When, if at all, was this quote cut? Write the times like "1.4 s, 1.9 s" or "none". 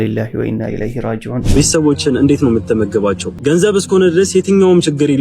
1.4 s, 3.3 s